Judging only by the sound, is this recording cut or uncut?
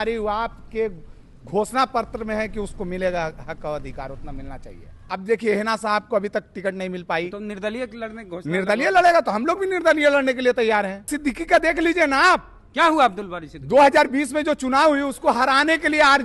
cut